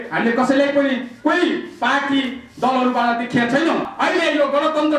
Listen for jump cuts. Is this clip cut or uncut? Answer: cut